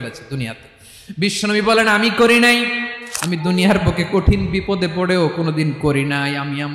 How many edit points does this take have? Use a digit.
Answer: 1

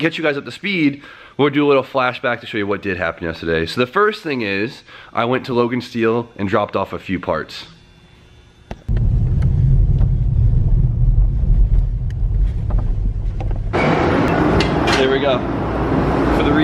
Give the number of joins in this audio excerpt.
0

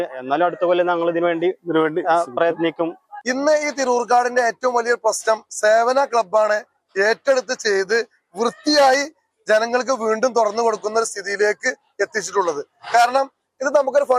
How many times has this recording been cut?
1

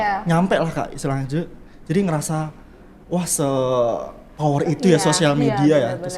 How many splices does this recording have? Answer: 0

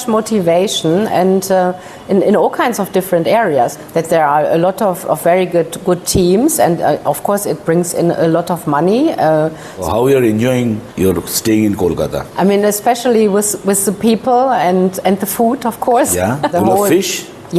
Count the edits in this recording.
5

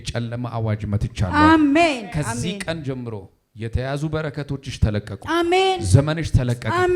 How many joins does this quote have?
0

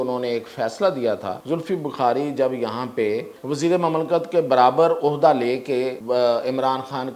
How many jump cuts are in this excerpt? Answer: 3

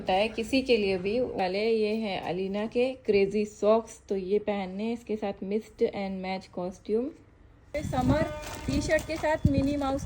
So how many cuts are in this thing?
2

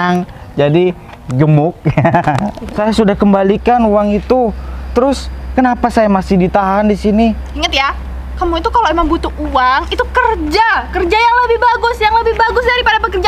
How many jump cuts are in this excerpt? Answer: 1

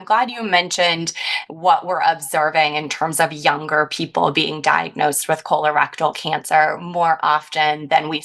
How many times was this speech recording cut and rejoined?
0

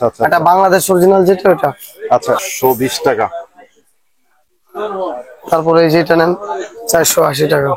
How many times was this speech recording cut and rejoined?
1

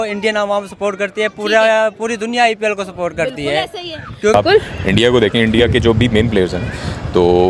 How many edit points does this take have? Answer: 1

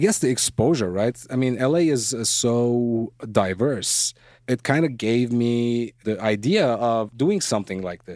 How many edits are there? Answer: 4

